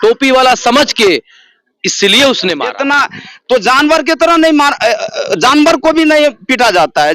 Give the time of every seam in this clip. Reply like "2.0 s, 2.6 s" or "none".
2.8 s